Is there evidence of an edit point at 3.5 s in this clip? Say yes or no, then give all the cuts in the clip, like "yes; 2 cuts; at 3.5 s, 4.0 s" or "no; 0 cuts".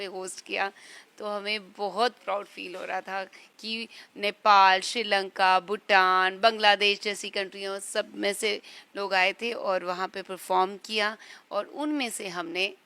no; 0 cuts